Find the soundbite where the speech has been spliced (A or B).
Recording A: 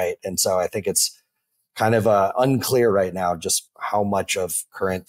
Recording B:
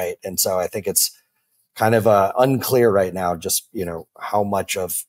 A